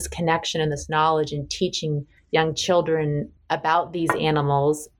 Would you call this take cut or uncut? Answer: cut